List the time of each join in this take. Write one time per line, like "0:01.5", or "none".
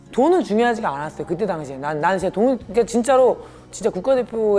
none